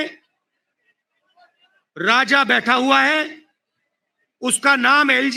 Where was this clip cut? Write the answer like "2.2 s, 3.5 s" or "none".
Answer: none